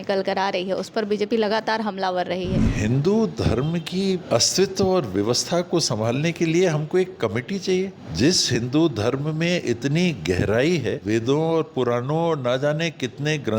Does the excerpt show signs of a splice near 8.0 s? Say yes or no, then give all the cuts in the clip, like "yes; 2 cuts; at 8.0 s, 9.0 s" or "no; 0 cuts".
yes; 4 cuts; at 2.7 s, 4.2 s, 8.0 s, 11.0 s